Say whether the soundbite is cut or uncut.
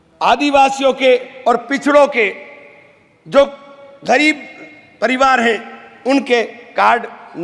uncut